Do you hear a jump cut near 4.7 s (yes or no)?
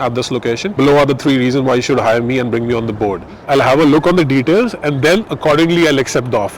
no